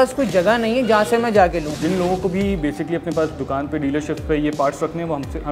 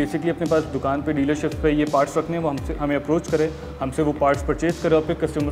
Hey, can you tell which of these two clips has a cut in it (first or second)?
first